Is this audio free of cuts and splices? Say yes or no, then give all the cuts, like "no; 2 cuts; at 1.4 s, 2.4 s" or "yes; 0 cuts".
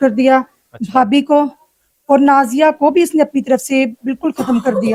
yes; 0 cuts